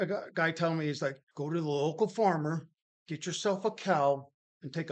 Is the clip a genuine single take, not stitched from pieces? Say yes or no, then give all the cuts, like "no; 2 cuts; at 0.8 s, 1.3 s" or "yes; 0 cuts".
no; 1 cut; at 1.3 s